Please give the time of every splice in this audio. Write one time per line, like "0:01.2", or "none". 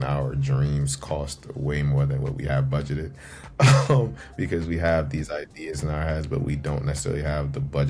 none